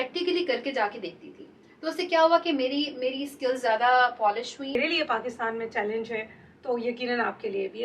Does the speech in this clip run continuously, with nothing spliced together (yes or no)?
no